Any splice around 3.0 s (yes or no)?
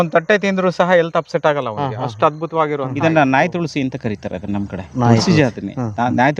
yes